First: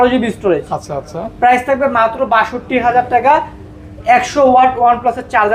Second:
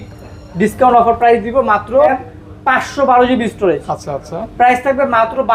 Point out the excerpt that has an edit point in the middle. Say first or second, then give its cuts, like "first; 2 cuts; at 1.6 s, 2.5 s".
second; 1 cut; at 2.2 s